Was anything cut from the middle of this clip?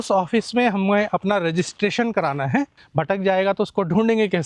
yes; 1 cut; at 2.8 s

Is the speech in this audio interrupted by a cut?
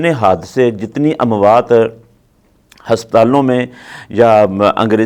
no; 0 cuts

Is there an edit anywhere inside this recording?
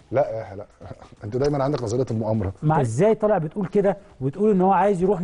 yes; 1 cut; at 2.8 s

